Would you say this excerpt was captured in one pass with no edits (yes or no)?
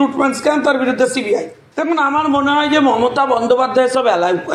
no